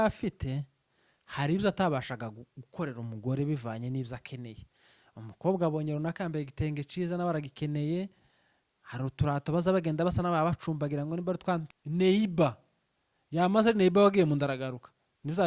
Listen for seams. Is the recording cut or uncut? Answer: cut